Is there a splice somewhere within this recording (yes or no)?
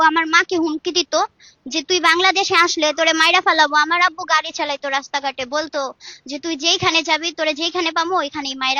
no